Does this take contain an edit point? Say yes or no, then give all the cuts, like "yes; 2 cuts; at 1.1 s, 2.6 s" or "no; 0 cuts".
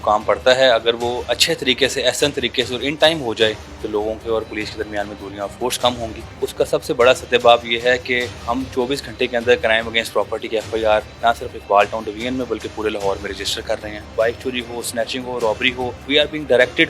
yes; 6 cuts; at 3.7 s, 6.2 s, 8.4 s, 11.1 s, 14.1 s, 16.0 s